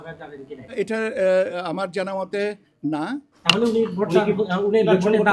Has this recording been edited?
no; 0 cuts

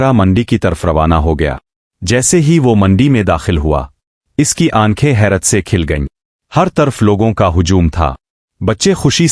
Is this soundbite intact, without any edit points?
yes; 0 cuts

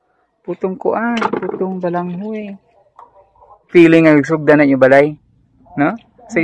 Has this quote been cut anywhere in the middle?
yes; 1 cut; at 3.7 s

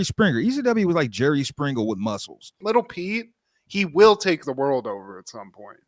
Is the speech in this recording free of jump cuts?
no; 1 cut; at 2.5 s

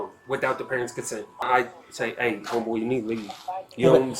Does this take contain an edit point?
yes; 1 cut; at 1.4 s

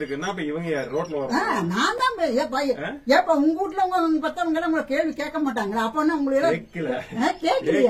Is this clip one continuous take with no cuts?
yes; 0 cuts

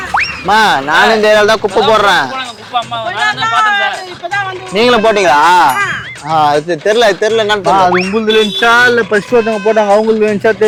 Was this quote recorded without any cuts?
yes; 0 cuts

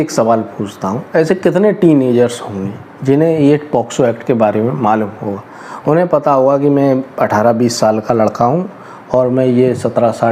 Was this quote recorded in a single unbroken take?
yes; 0 cuts

